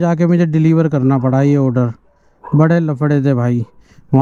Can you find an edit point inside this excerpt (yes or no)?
no